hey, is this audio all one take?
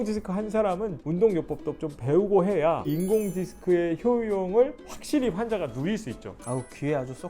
no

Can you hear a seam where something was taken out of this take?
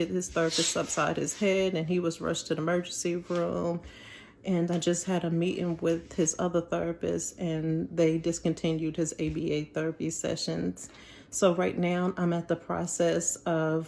no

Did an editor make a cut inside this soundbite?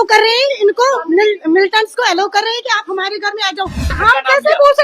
yes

